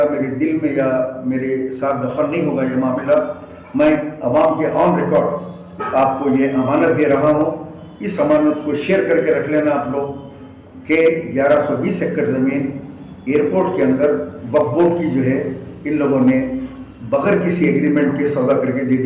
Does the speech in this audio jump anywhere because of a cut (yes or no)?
no